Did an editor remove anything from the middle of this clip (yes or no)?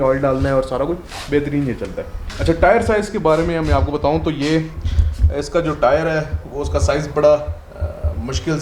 no